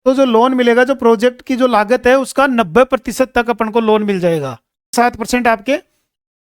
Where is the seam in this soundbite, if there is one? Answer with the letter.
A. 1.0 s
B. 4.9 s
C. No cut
B